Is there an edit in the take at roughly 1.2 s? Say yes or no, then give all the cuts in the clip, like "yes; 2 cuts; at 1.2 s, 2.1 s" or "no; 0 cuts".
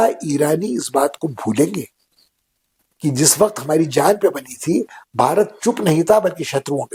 no; 0 cuts